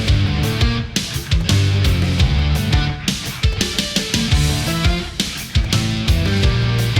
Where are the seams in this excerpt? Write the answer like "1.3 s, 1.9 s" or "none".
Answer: 5.1 s